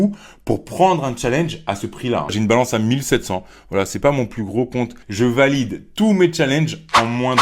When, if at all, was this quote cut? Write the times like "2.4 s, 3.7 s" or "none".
2.3 s, 5.0 s